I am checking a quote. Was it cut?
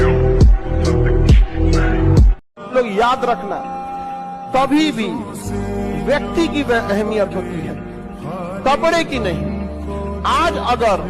yes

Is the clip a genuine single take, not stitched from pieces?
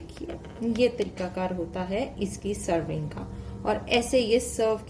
yes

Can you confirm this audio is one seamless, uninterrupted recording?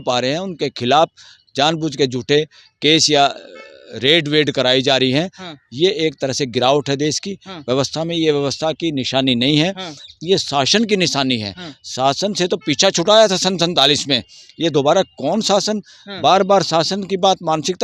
yes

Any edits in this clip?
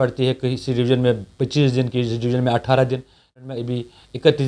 yes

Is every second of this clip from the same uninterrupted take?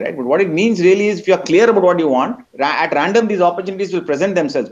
no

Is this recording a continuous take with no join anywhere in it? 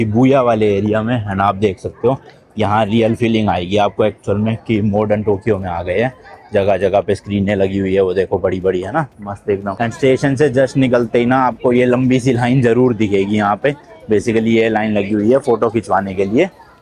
yes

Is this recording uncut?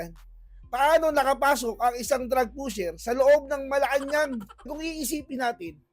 no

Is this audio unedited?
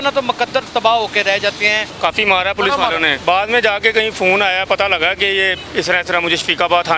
no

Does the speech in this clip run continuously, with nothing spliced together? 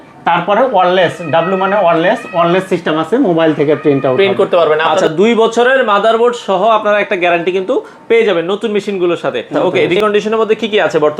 no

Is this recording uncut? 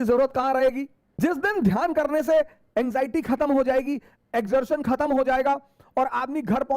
no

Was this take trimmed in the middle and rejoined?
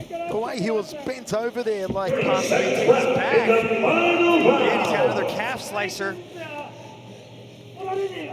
yes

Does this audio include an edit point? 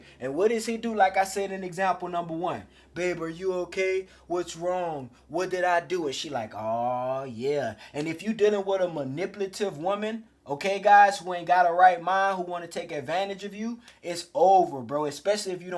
no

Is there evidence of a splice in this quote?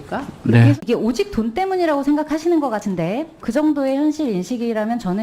yes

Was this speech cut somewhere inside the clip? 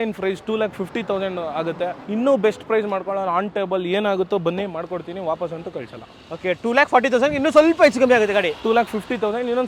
no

